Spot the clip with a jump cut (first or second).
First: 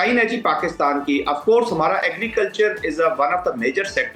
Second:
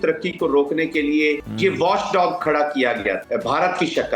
second